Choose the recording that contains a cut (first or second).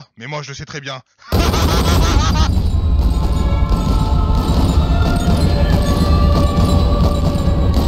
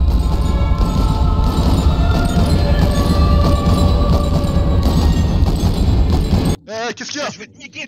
second